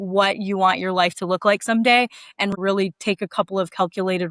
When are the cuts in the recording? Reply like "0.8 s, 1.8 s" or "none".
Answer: 2.5 s